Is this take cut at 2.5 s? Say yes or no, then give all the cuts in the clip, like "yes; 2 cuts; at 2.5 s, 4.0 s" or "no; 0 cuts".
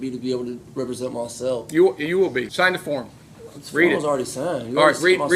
yes; 1 cut; at 2.5 s